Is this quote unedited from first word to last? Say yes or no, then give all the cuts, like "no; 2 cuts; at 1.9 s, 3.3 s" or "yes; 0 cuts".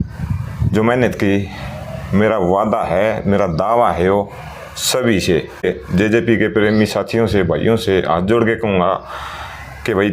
no; 1 cut; at 5.6 s